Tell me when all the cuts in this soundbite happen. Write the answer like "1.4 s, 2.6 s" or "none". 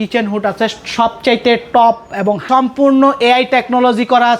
2.4 s